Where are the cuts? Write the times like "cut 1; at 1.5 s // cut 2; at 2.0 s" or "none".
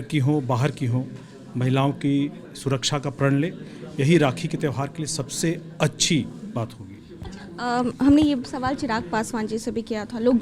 none